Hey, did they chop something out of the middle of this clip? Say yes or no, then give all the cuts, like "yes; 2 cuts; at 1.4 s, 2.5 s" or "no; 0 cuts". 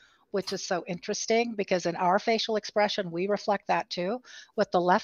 no; 0 cuts